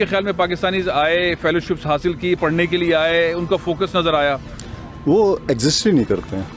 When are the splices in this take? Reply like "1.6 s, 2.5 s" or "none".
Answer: none